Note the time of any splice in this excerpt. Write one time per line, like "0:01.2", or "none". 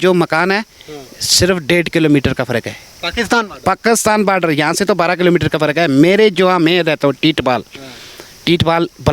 none